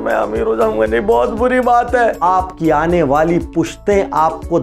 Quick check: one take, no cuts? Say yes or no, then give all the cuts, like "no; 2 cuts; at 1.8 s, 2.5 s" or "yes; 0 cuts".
no; 1 cut; at 2.2 s